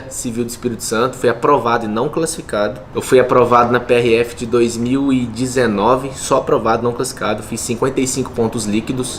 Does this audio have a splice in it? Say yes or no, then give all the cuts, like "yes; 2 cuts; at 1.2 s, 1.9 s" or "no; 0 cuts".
no; 0 cuts